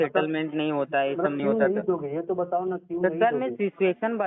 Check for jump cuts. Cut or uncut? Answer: uncut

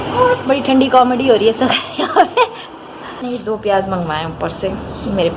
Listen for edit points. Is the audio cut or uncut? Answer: cut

